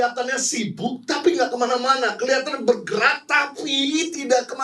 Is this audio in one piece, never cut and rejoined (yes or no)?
yes